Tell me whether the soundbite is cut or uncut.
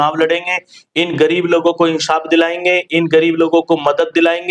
uncut